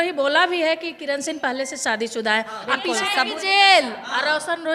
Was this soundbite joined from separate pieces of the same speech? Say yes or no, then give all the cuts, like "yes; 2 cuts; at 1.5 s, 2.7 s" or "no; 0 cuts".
yes; 1 cut; at 2.9 s